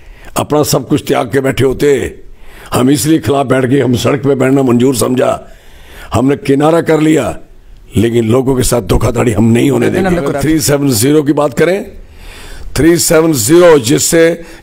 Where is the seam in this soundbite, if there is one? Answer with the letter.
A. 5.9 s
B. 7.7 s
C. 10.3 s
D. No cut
C